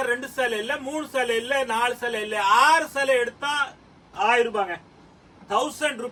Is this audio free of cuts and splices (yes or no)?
yes